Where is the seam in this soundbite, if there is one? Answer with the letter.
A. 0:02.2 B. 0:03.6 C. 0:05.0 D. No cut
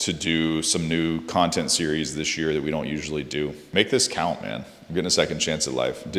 B